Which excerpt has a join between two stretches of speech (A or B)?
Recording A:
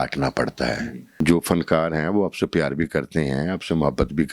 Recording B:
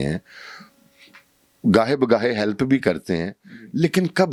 A